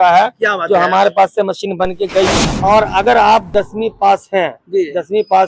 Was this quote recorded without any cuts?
no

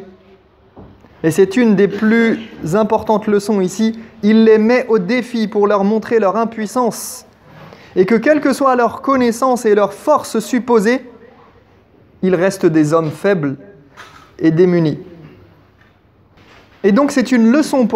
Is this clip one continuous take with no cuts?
no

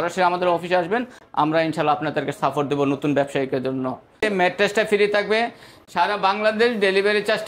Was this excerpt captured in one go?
no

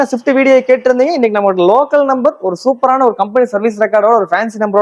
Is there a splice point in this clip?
no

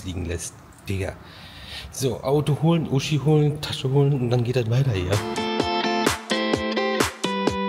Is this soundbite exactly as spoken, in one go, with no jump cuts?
yes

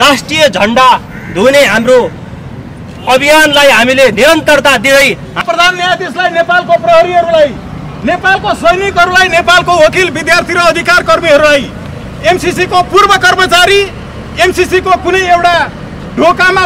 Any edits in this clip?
yes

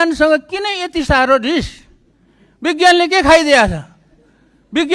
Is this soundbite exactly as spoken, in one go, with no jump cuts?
yes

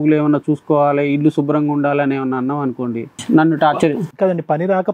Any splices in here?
yes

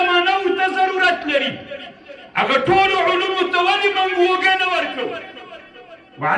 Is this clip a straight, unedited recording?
yes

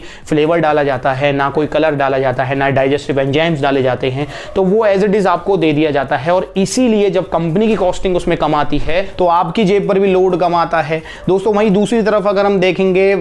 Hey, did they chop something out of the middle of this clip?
no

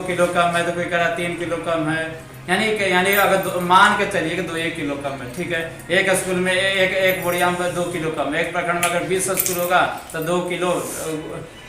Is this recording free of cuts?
yes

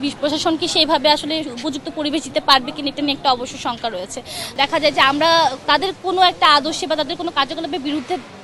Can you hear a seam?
yes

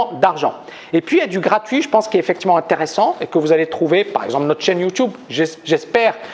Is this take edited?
yes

